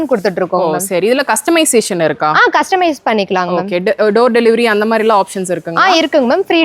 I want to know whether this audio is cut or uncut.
uncut